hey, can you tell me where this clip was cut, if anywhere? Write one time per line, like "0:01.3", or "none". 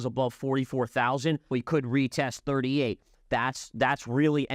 0:01.5
0:03.1

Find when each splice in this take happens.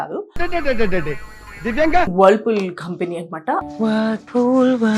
0:02.1
0:03.6

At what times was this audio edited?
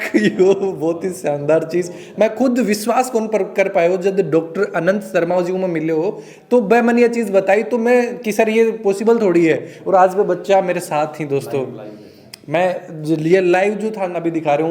none

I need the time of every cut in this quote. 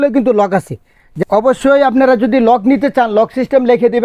0:01.1

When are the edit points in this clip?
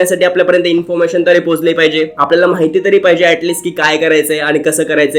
none

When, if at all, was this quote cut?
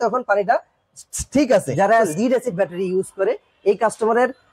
0:01.9

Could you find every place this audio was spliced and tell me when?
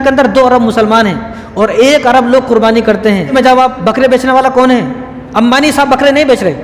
0:03.3

